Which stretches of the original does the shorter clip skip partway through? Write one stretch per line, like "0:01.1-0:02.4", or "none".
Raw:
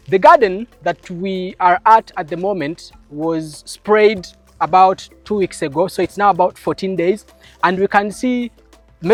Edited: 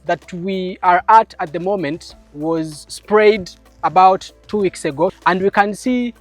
0:05.9-0:07.5

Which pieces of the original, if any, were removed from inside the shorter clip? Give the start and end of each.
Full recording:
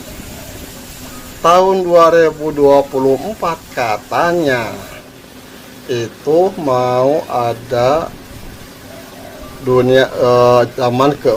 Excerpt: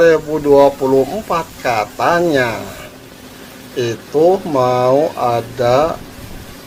none

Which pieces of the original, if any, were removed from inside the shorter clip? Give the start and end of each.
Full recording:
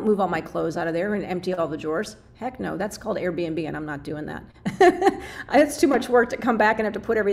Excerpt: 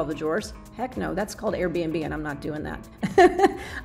none

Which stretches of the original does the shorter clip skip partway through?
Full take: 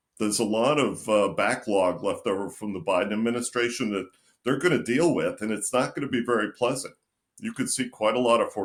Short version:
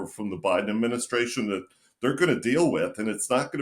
none

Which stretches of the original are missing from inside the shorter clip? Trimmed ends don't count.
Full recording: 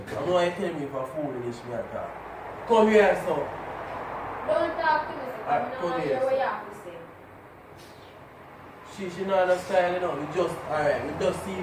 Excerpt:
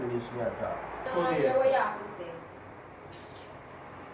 0:02.4-0:05.7

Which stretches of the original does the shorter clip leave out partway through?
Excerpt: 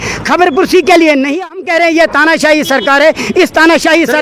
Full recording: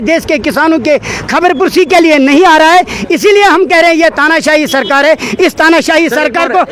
0:02.4-0:03.4

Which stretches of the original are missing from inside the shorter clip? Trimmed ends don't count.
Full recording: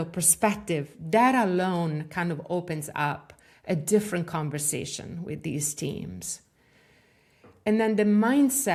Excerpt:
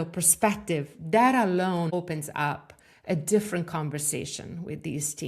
0:01.9-0:02.5

